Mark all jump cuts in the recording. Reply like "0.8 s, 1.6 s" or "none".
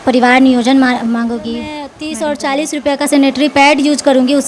2.0 s